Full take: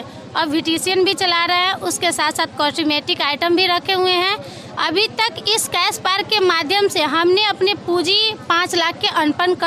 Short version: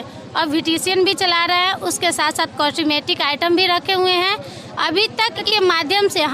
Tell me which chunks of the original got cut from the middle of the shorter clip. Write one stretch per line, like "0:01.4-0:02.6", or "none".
0:05.4-0:06.2

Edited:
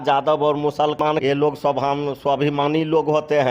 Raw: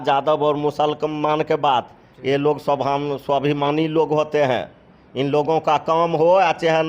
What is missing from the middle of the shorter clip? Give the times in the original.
0:01.0-0:02.0

